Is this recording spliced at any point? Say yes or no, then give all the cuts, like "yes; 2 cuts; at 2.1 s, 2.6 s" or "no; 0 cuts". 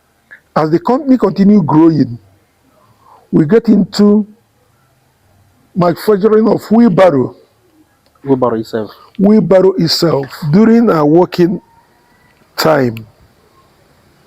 yes; 1 cut; at 10.3 s